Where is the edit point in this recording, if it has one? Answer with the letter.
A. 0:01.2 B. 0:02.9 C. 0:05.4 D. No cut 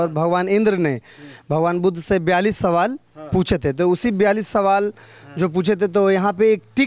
D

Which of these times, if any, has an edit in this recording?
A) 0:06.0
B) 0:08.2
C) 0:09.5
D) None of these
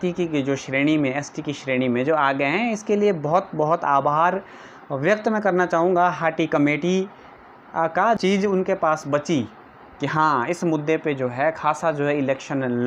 B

